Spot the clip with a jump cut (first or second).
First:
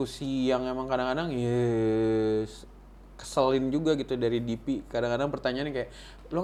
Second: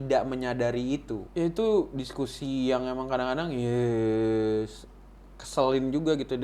second